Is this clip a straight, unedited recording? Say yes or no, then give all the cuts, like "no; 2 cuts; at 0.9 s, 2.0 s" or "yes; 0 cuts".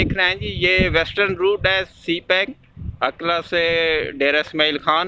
yes; 0 cuts